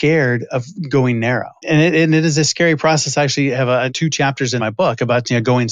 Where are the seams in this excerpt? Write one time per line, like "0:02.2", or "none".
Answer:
0:01.6
0:04.4